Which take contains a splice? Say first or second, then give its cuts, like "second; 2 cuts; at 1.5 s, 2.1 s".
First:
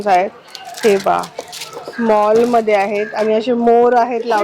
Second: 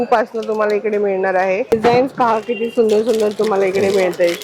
second; 1 cut; at 1.7 s